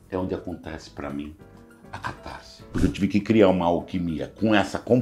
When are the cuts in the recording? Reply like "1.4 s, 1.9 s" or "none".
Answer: 2.7 s